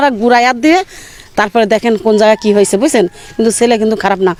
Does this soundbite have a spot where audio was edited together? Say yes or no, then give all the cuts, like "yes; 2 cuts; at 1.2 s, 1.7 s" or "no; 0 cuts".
no; 0 cuts